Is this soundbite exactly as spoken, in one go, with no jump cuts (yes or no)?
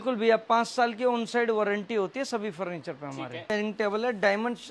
no